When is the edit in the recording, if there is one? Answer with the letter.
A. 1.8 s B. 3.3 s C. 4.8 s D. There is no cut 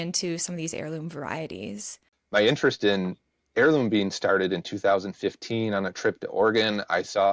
A